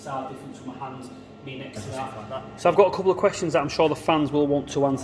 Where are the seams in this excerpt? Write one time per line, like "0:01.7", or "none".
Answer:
0:02.2